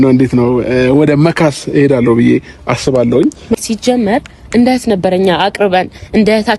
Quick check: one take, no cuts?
no; 1 cut; at 3.4 s

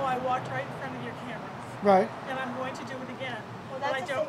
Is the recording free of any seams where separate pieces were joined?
yes; 0 cuts

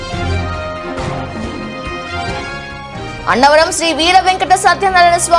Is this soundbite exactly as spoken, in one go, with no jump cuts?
no; 1 cut; at 1.4 s

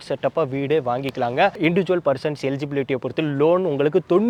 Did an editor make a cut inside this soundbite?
no; 0 cuts

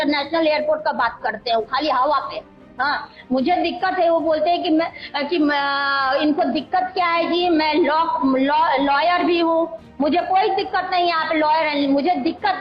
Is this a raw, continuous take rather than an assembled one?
yes; 0 cuts

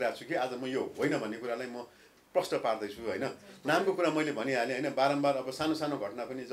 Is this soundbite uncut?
yes; 0 cuts

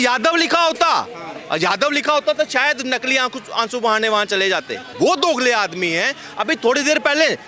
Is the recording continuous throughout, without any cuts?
no; 1 cut; at 4.9 s

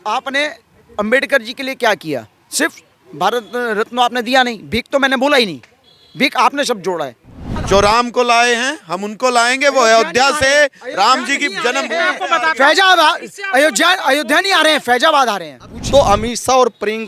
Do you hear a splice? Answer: yes; 2 cuts; at 7.5 s, 15.8 s

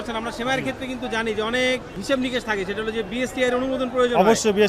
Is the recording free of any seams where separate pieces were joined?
no; 1 cut; at 1.9 s

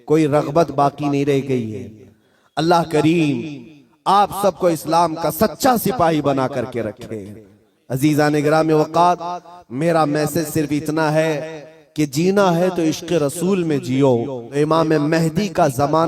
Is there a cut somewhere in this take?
yes; 1 cut; at 14.4 s

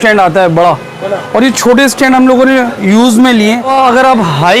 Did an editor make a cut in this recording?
yes; 1 cut; at 3.7 s

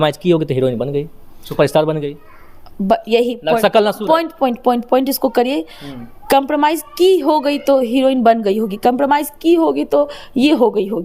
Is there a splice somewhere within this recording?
no; 0 cuts

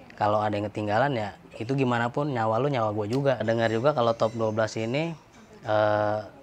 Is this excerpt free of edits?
no; 1 cut; at 3.4 s

